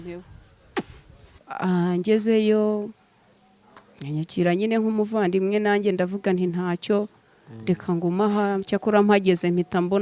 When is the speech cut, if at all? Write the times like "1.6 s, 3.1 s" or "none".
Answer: 1.4 s